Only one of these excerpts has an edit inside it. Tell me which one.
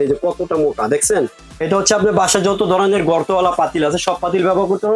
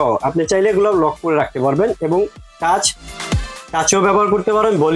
first; 1 cut; at 1.4 s

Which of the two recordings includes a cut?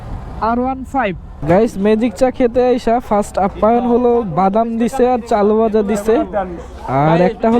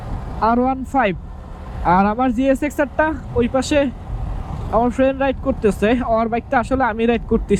first; 1 cut; at 1.3 s

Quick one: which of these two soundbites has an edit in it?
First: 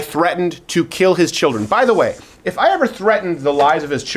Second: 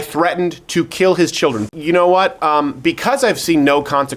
second; 1 cut; at 1.6 s

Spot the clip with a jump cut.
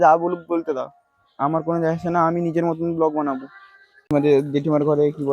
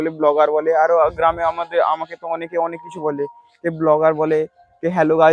first; 1 cut; at 4.1 s

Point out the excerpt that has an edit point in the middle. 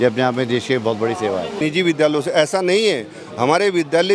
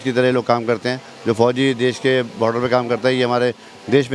first; 1 cut; at 1.6 s

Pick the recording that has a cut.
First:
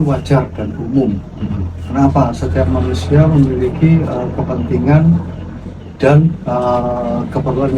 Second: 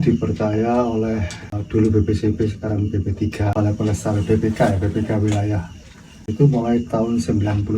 second; 3 cuts; at 1.6 s, 3.5 s, 6.3 s

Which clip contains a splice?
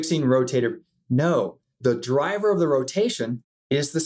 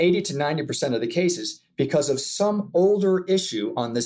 first; 1 cut; at 1.7 s

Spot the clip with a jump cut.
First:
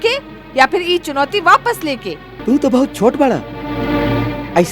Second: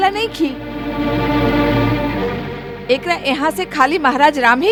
first; 1 cut; at 2.3 s

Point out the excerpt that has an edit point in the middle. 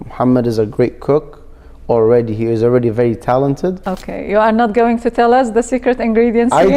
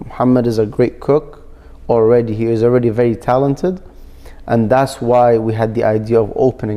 first; 1 cut; at 3.9 s

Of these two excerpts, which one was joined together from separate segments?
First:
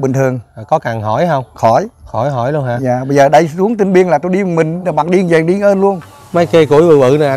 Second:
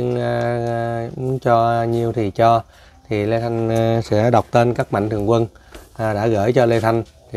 first; 1 cut; at 6.1 s

